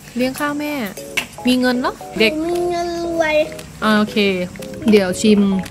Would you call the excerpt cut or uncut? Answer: cut